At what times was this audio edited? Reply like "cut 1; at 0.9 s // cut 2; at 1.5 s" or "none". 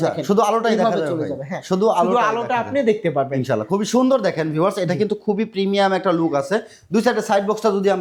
none